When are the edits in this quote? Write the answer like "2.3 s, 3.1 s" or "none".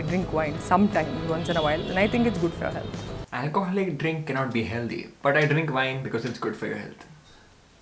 3.2 s